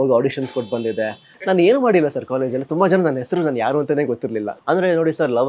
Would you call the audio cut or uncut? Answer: cut